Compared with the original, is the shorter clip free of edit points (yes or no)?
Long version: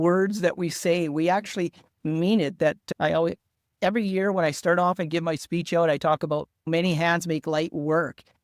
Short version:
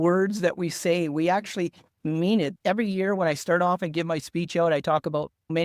no